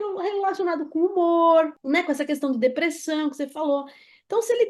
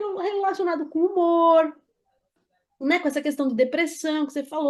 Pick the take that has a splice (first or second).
first